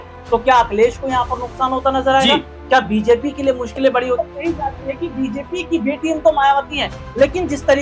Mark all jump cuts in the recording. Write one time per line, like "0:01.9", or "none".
0:04.3